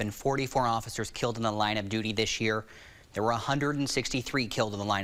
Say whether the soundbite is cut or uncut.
uncut